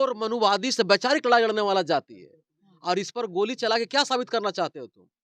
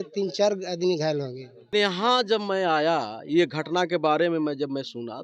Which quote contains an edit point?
second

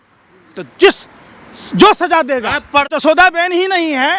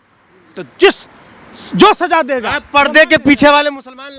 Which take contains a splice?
first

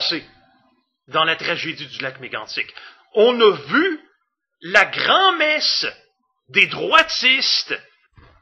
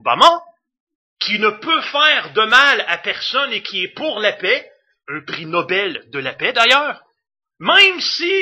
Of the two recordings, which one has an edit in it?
second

